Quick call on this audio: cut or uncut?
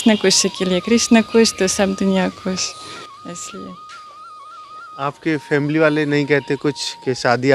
uncut